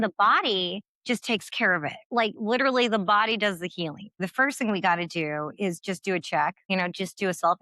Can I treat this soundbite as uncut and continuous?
no; 3 cuts; at 2.1 s, 4.2 s, 6.6 s

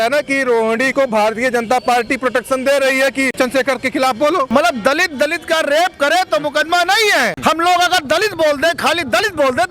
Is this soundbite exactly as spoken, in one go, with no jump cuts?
no; 3 cuts; at 3.3 s, 4.5 s, 7.3 s

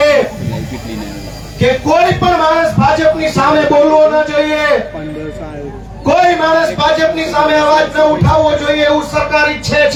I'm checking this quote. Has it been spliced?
no; 0 cuts

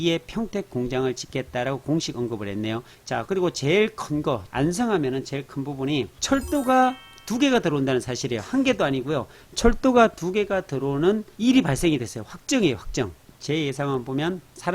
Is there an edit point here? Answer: yes; 2 cuts; at 2.9 s, 13.3 s

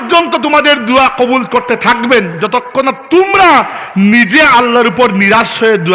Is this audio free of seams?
yes; 0 cuts

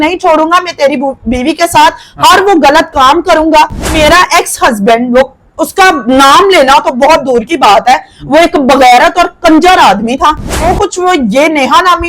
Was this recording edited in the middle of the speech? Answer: yes; 2 cuts; at 4.0 s, 10.7 s

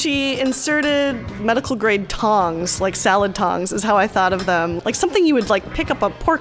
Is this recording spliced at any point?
yes; 2 cuts; at 1.3 s, 4.8 s

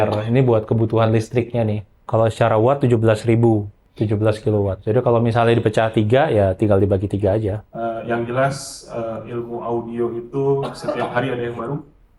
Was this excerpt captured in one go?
no; 4 cuts; at 1.9 s, 3.8 s, 4.8 s, 7.6 s

